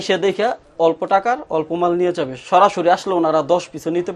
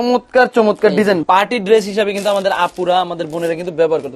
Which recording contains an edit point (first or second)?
second